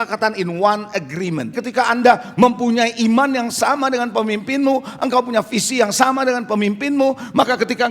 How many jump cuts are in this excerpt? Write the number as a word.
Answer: one